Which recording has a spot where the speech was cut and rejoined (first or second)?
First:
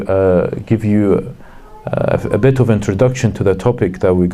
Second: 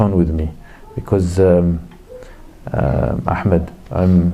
first